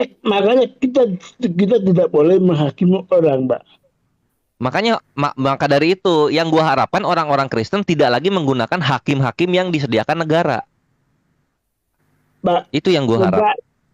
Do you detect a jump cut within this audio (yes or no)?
no